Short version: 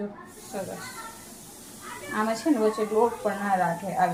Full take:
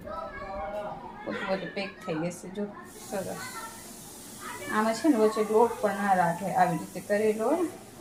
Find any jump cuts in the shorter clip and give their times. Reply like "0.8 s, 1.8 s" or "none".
none